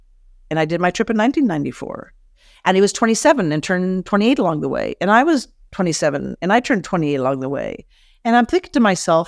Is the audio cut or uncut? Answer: uncut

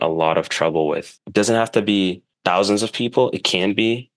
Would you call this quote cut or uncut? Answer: cut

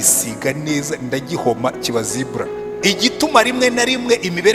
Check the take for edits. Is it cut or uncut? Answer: cut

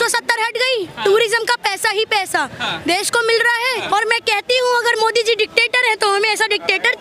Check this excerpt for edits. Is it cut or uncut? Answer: cut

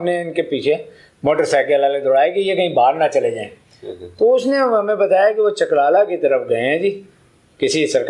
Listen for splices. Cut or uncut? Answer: uncut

